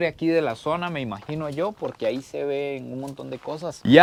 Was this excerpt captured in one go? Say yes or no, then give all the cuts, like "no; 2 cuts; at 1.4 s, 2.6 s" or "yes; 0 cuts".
yes; 0 cuts